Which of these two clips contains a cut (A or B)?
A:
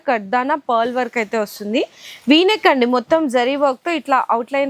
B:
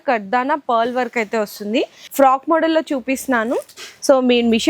B